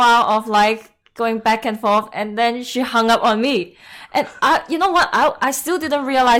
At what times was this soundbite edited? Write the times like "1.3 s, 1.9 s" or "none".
none